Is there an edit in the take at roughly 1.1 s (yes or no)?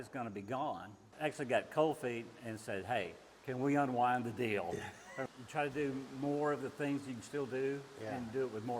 yes